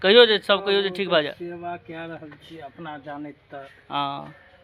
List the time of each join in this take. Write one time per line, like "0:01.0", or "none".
none